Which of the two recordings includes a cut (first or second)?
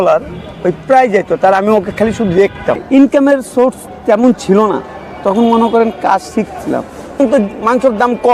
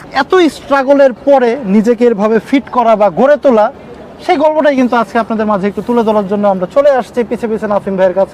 first